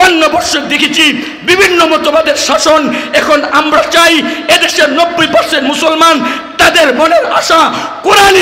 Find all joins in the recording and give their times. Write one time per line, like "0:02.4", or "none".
none